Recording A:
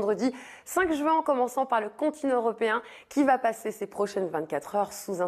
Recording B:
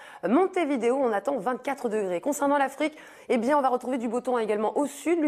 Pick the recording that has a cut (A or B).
B